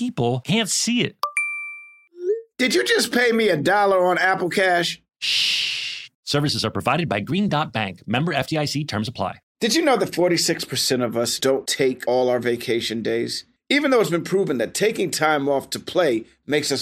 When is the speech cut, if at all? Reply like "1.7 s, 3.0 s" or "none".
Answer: 9.4 s